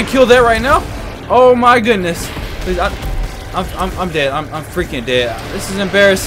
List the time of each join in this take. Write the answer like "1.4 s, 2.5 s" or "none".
none